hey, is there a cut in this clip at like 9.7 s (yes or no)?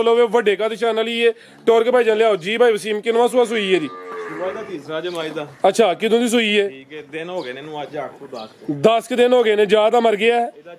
no